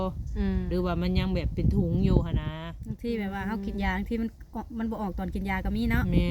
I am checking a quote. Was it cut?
no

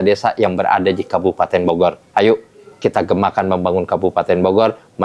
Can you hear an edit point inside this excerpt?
no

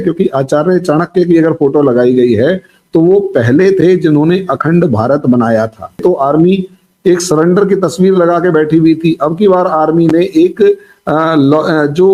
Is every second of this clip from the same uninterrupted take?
no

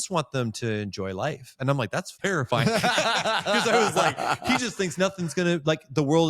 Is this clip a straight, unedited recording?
no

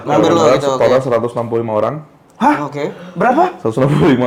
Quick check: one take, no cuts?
yes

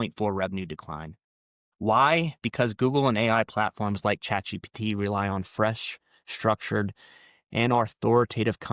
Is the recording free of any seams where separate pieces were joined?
yes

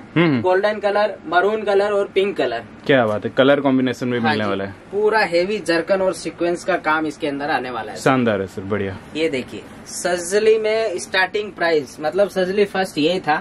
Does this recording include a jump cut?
no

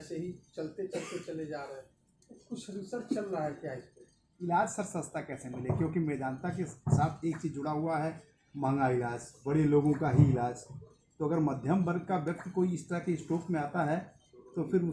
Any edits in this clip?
yes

